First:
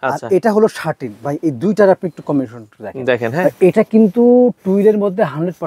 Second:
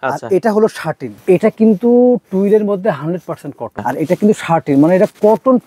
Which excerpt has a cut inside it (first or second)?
second